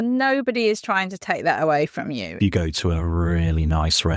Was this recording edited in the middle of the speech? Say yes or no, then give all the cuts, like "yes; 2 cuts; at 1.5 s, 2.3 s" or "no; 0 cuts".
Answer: yes; 1 cut; at 2.3 s